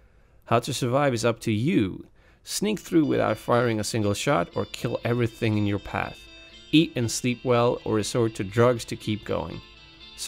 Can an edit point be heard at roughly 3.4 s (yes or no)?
no